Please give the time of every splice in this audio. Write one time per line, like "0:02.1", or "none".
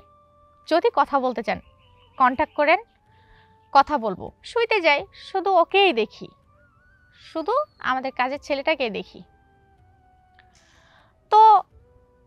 0:04.3